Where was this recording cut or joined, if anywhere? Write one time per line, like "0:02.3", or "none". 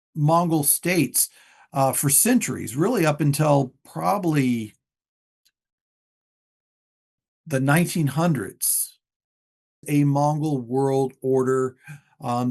0:09.9